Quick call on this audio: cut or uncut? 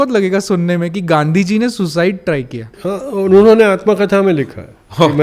uncut